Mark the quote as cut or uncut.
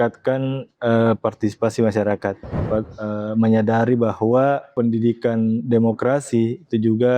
cut